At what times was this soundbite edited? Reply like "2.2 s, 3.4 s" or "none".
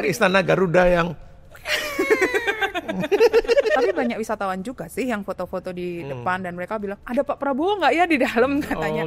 3.8 s

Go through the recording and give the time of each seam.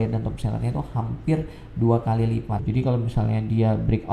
2.6 s

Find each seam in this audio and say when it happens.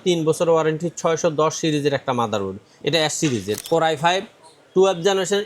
3.6 s

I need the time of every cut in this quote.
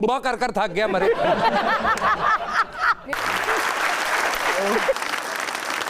3.1 s

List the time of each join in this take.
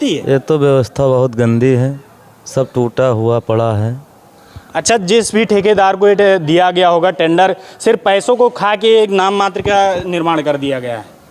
none

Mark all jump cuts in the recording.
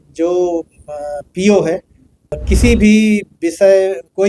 2.4 s

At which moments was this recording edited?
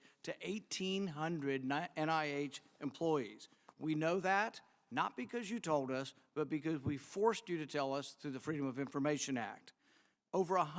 none

